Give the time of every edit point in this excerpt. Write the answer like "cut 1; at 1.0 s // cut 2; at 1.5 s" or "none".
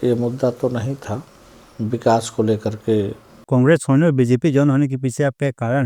cut 1; at 3.4 s